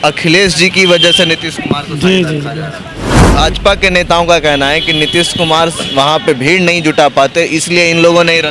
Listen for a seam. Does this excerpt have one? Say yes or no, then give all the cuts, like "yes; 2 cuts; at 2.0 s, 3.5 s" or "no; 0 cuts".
yes; 1 cut; at 3.1 s